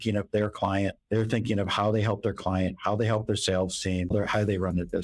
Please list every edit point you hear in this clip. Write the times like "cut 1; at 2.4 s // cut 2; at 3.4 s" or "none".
cut 1; at 1.0 s // cut 2; at 4.1 s